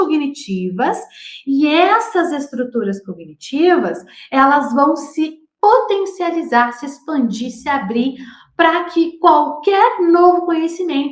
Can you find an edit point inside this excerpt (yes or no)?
no